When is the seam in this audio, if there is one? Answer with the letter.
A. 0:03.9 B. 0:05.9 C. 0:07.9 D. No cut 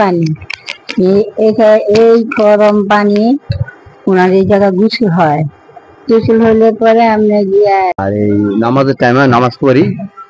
C